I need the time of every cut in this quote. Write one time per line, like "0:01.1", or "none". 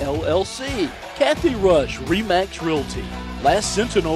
0:01.0